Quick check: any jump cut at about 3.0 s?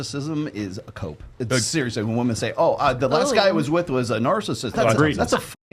no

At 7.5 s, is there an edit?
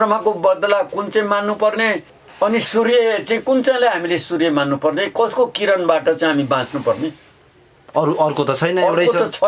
no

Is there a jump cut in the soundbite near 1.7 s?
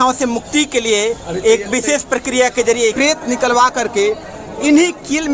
no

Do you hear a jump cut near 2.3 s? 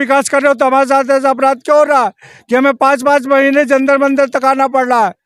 no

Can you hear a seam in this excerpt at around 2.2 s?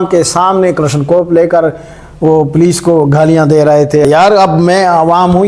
no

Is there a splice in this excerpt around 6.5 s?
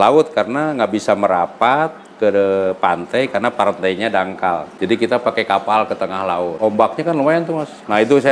yes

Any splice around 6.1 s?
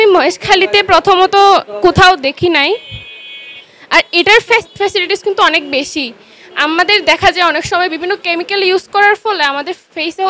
no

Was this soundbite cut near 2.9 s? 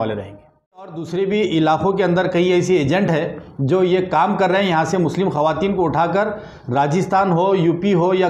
no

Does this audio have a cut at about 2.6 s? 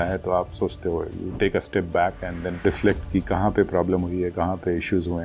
yes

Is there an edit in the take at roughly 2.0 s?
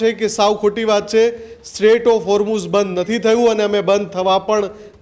no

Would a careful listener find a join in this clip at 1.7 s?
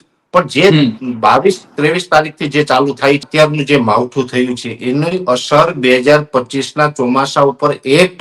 no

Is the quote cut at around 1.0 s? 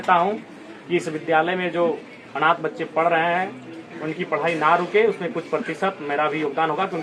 no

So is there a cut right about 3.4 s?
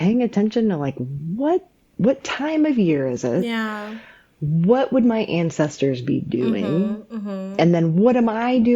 no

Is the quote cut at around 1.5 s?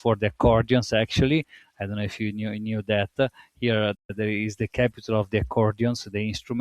no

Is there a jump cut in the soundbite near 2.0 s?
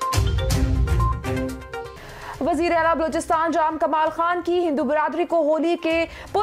yes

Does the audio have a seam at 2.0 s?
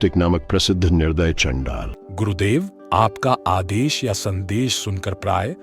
yes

